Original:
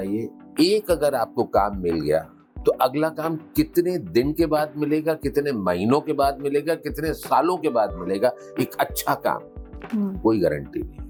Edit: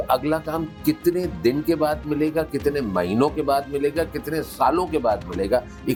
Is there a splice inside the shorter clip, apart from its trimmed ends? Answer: no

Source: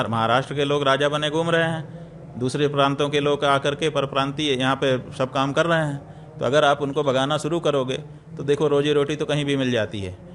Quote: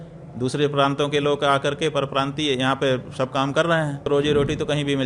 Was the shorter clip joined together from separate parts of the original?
yes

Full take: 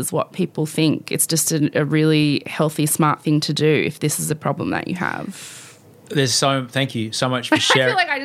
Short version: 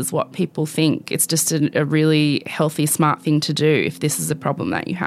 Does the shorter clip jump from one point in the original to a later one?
no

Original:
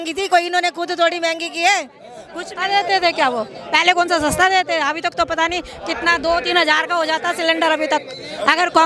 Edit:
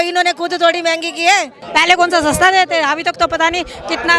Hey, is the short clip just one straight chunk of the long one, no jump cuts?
no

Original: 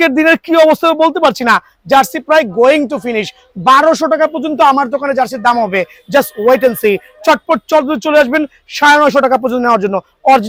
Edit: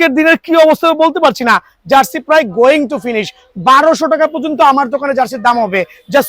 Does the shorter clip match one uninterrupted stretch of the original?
yes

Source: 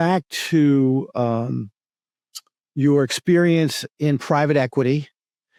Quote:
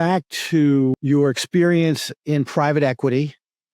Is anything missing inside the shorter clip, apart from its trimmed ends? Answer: yes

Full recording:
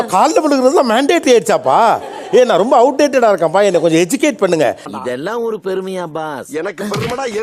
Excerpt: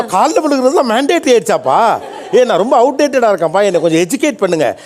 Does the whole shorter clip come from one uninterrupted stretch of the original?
yes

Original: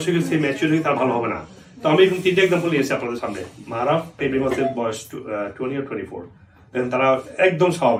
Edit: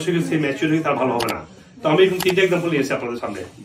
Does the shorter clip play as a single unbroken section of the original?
yes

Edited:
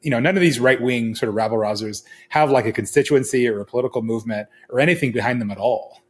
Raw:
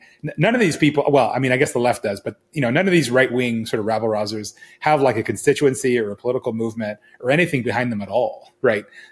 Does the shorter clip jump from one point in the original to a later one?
no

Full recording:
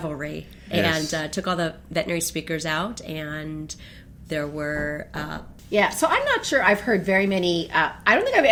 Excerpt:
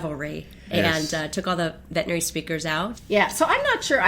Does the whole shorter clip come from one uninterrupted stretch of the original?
no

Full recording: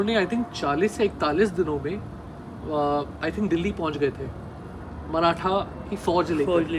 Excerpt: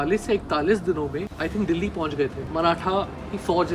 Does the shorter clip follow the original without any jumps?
no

